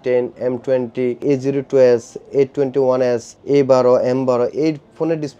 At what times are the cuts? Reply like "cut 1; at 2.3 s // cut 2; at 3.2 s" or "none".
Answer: cut 1; at 1.2 s // cut 2; at 3.3 s